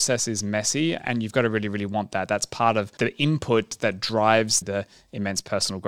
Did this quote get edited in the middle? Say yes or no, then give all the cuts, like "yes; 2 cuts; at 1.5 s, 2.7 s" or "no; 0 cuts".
yes; 3 cuts; at 1.0 s, 2.9 s, 4.6 s